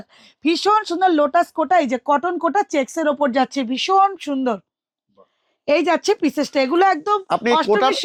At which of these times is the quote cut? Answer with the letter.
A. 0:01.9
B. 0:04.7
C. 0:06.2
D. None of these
D